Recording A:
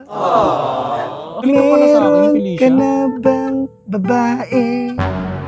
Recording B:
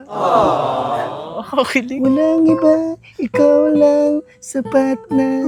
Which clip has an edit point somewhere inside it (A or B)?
A